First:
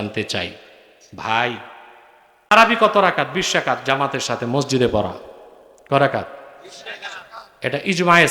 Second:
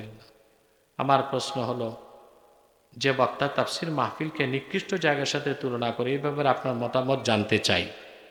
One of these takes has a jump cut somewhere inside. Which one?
first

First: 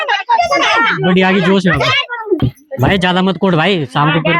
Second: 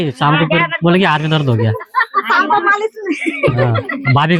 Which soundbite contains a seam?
first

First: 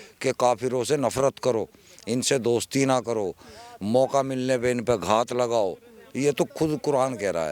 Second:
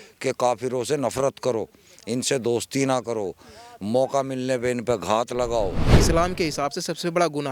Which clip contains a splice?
second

